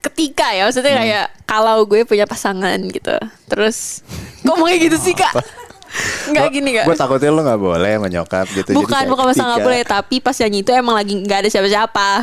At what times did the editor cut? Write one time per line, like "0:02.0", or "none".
none